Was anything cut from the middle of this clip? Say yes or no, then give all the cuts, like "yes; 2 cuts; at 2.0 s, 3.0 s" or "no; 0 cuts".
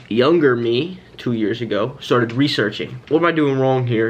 yes; 1 cut; at 2.9 s